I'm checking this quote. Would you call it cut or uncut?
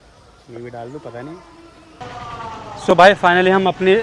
cut